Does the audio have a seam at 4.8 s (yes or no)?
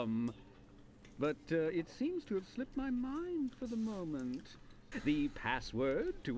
yes